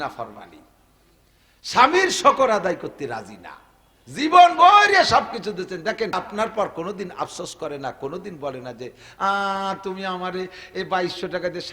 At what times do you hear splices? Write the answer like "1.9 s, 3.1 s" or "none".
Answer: 6.2 s